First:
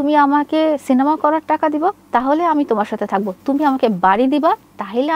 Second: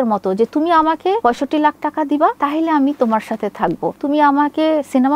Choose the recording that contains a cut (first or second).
second